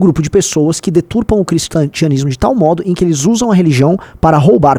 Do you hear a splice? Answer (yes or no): no